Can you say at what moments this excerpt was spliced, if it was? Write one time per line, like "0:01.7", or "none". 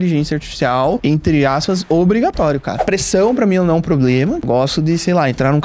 0:01.0
0:02.8
0:04.5